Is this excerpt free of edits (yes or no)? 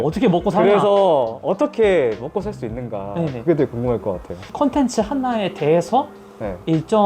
no